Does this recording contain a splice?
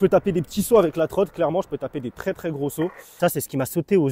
yes; 1 cut; at 3.2 s

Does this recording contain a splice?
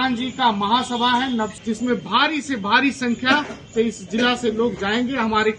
yes; 1 cut; at 1.6 s

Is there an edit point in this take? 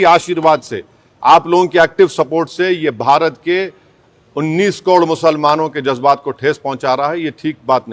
no; 0 cuts

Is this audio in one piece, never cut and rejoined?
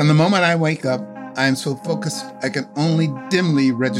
no; 1 cut; at 1.2 s

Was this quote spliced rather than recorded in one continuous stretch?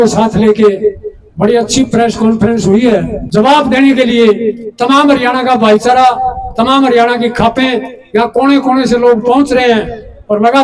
yes; 1 cut; at 3.2 s

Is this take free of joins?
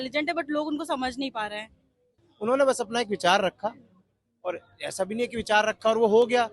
no; 1 cut; at 2.2 s

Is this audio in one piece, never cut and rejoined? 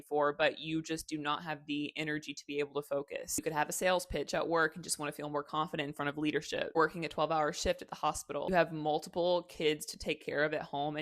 no; 1 cut; at 3.3 s

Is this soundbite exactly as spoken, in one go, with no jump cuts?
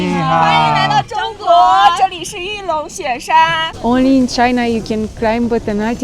no; 1 cut; at 3.7 s

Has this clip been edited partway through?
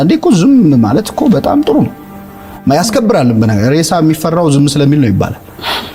no; 0 cuts

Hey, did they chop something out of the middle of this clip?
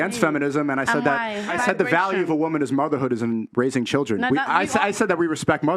yes; 1 cut; at 1.6 s

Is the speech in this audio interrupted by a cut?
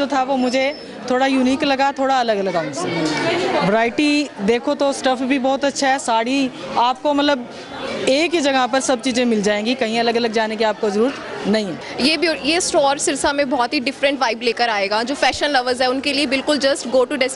no; 0 cuts

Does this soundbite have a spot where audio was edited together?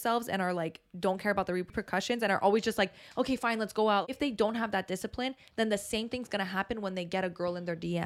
yes; 2 cuts; at 1.7 s, 4.1 s

